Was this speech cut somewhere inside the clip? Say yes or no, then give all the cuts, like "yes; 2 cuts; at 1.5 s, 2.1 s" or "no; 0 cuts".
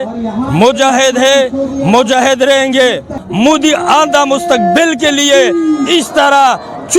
yes; 1 cut; at 3.2 s